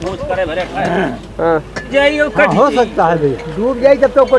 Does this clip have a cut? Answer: yes; 1 cut; at 1.8 s

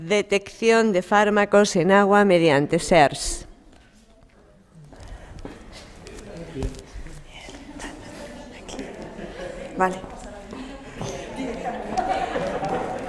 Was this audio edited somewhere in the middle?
no; 0 cuts

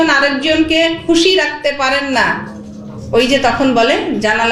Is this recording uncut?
yes; 0 cuts

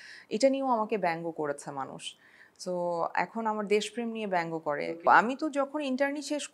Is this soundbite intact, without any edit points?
no; 1 cut; at 5.1 s

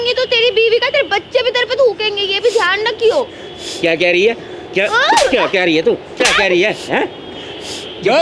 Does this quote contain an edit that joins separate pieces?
no; 0 cuts

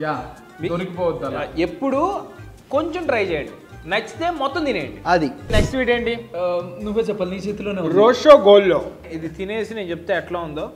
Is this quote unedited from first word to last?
no; 2 cuts; at 5.5 s, 9.1 s

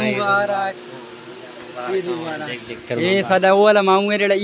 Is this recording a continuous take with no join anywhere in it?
yes; 0 cuts

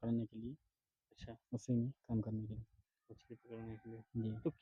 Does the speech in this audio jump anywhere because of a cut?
no; 0 cuts

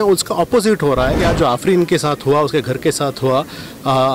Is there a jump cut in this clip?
yes; 1 cut; at 1.2 s

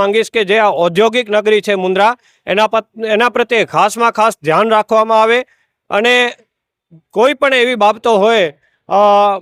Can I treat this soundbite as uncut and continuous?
yes; 0 cuts

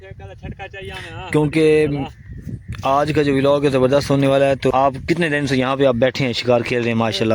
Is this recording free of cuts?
no; 1 cut; at 4.7 s

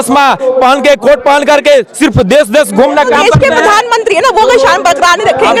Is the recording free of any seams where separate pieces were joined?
yes; 0 cuts

